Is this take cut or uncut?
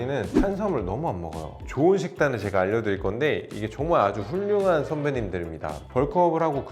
cut